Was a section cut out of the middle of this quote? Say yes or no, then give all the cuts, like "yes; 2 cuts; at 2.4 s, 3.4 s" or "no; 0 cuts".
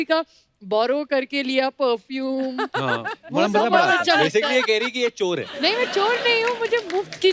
no; 0 cuts